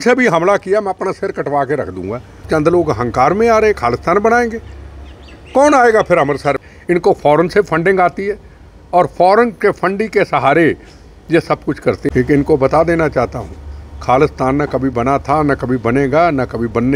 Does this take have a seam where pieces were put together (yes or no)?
yes